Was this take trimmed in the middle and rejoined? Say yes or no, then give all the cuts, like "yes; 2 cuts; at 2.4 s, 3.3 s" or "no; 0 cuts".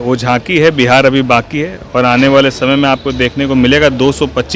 no; 0 cuts